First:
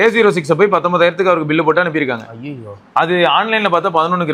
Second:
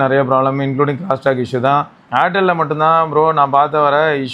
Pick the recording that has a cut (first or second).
second